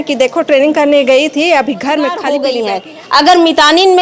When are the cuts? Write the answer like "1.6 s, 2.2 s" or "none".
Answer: 2.3 s

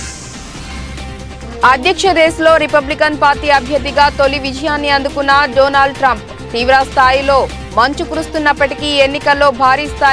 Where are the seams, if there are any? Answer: 1.6 s

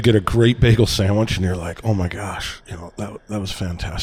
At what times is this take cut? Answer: none

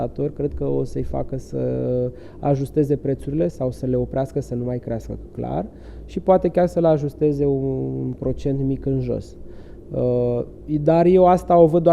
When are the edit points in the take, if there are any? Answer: none

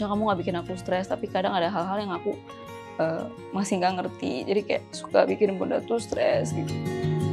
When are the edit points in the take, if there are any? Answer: none

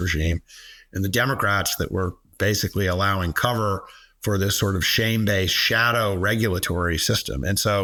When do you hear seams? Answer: none

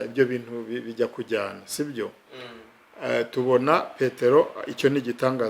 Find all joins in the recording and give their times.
none

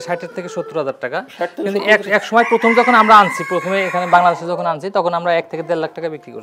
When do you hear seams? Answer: none

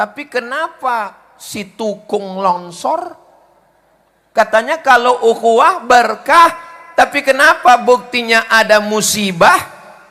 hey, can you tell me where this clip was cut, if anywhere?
none

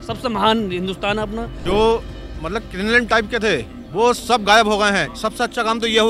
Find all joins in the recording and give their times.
1.5 s

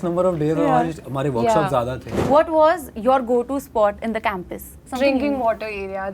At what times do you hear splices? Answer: 2.1 s, 4.8 s

